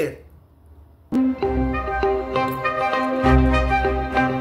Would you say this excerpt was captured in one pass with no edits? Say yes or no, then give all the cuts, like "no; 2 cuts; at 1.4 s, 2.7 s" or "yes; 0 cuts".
no; 1 cut; at 1.1 s